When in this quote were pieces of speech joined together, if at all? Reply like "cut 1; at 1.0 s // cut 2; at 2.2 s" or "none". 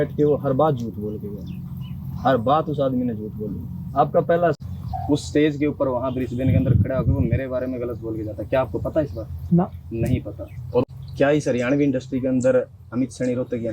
cut 1; at 4.6 s // cut 2; at 10.9 s